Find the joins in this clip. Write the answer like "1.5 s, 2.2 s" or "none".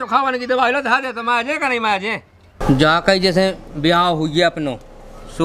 2.6 s